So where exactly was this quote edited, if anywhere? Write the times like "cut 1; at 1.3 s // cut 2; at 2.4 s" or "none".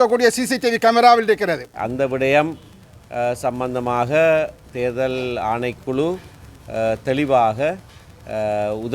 cut 1; at 1.8 s